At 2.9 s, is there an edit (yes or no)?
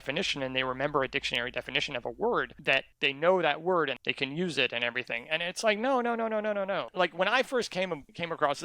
yes